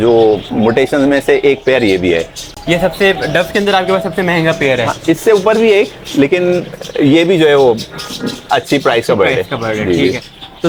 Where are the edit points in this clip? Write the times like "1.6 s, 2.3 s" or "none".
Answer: none